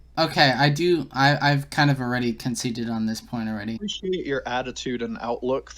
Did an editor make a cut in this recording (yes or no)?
yes